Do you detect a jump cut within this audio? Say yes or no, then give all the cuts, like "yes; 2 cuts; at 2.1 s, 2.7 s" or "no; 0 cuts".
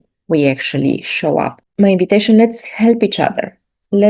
yes; 1 cut; at 1.6 s